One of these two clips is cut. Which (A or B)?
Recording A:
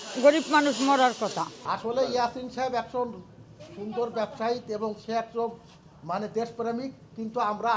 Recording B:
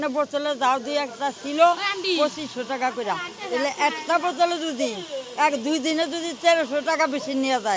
A